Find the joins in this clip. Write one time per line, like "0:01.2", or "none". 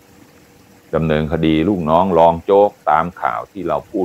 0:00.9